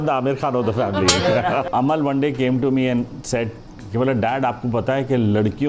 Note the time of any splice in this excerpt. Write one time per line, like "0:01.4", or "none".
0:01.6